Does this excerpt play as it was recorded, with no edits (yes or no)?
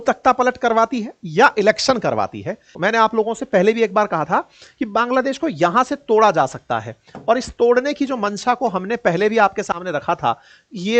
no